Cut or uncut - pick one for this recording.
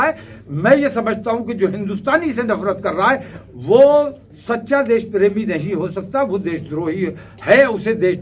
uncut